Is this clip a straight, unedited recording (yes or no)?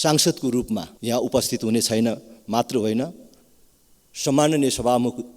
no